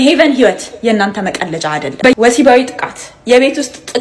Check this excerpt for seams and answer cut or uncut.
cut